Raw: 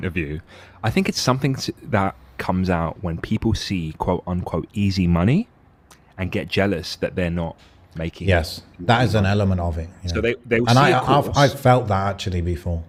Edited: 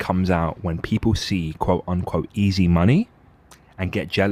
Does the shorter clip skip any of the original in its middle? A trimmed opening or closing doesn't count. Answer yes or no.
no